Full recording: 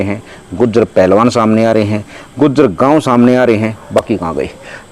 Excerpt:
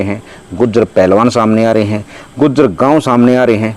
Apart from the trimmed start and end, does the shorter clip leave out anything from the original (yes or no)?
no